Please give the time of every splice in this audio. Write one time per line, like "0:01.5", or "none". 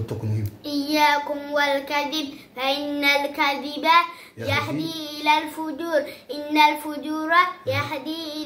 none